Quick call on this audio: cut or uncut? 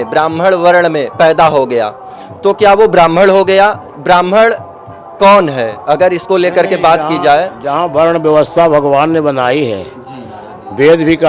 uncut